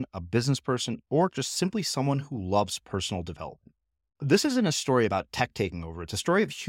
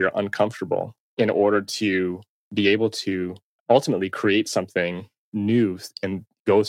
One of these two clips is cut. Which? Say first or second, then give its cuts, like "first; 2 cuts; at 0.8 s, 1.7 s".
second; 3 cuts; at 1.0 s, 3.5 s, 5.3 s